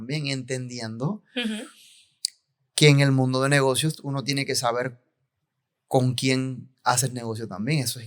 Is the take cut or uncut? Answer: uncut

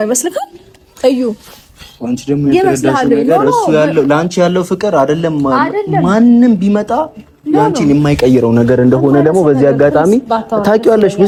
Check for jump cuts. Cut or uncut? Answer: uncut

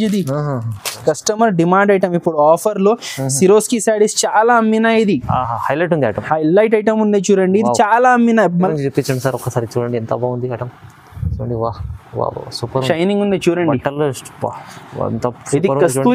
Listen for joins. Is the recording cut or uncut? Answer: cut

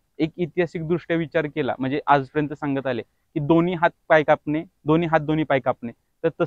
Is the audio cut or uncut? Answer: uncut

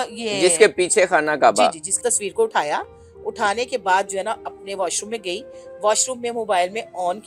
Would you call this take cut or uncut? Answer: cut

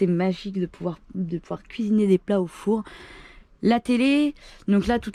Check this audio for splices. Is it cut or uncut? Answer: uncut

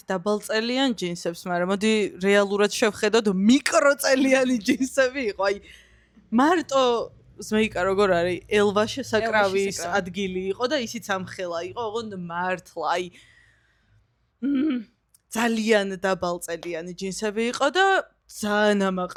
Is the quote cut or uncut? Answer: uncut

